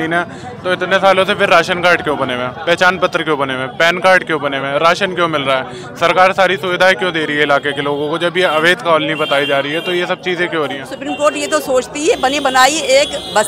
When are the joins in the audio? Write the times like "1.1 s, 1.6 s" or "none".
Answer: 10.9 s